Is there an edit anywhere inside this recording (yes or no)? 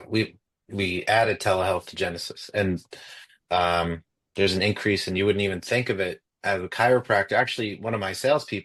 no